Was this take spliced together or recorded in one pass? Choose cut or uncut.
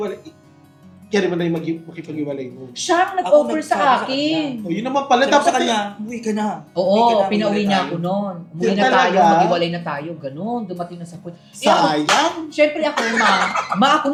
uncut